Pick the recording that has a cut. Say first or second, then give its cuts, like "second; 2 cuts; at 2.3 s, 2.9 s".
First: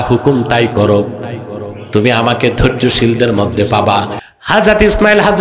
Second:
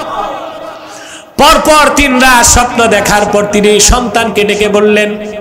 first; 1 cut; at 4.2 s